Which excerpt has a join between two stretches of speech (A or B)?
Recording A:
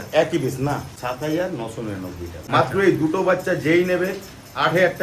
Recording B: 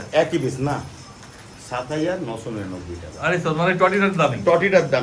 A